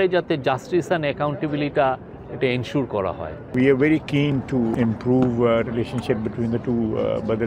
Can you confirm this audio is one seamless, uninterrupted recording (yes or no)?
no